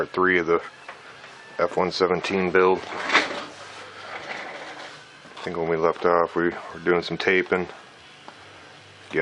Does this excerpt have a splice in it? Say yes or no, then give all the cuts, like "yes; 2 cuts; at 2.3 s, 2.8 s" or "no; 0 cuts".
no; 0 cuts